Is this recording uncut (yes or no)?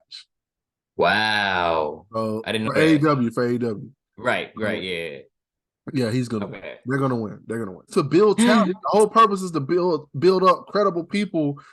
no